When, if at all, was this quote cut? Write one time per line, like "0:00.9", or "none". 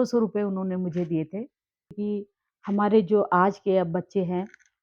0:02.0